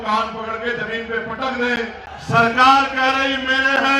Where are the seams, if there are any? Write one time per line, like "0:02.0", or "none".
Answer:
0:02.0